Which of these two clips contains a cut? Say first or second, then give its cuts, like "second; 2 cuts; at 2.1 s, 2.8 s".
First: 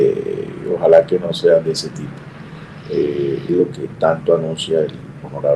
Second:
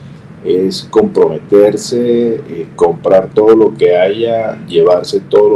first; 1 cut; at 3.5 s